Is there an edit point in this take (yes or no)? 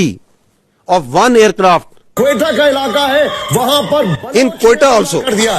yes